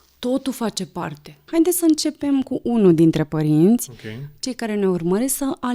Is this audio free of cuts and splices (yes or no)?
no